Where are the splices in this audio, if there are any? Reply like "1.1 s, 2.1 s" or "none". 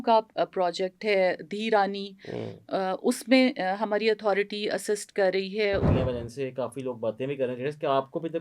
5.9 s